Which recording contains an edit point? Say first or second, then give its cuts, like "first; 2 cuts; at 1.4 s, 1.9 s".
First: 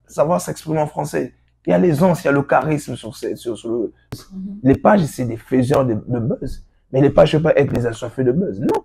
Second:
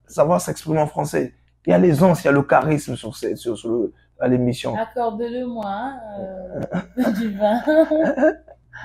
first; 1 cut; at 4.1 s